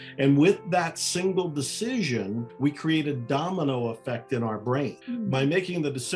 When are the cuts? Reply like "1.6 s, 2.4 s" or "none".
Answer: 2.5 s, 5.0 s